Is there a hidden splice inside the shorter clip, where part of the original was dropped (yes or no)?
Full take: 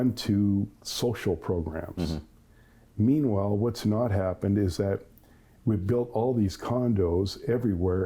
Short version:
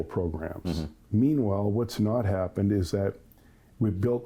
yes